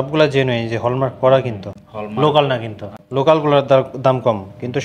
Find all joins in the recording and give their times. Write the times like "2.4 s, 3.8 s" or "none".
none